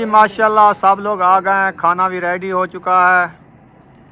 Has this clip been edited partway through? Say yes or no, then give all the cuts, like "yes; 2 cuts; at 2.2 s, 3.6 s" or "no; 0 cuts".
no; 0 cuts